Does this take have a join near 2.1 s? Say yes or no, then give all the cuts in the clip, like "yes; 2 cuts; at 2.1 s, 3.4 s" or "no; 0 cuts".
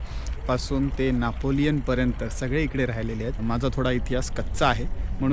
no; 1 cut; at 3.4 s